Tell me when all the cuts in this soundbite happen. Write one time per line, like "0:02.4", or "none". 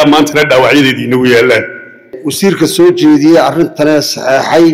0:02.2